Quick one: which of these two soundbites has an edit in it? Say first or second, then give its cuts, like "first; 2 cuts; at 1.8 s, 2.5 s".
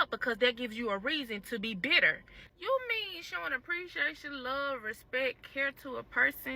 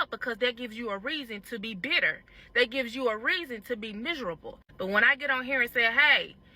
first; 1 cut; at 2.3 s